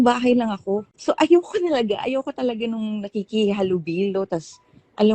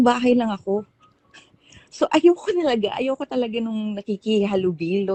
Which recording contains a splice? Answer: first; 1 cut; at 0.9 s

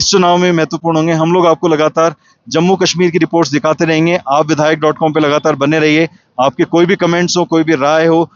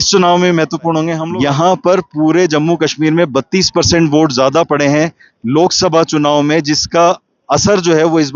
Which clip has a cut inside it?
second; 1 cut; at 1.2 s

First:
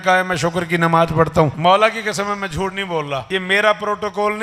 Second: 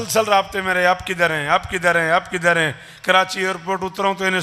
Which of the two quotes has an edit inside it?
first; 2 cuts; at 1.5 s, 3.2 s

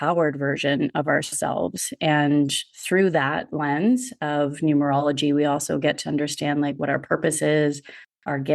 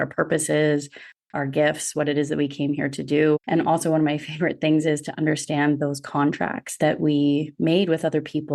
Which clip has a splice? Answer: second; 1 cut; at 3.4 s

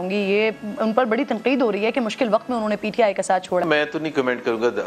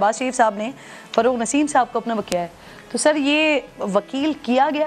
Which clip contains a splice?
first; 1 cut; at 3.6 s

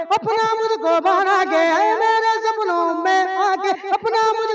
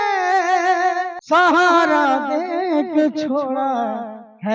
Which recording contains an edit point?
second; 1 cut; at 1.1 s

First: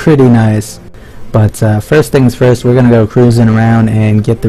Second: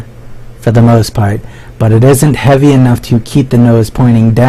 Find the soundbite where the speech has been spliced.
second; 1 cut; at 0.9 s

